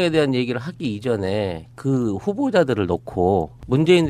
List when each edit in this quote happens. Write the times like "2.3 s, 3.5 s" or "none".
none